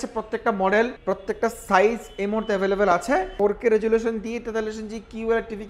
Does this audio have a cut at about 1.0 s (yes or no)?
yes